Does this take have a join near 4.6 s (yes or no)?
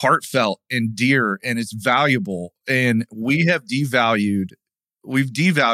no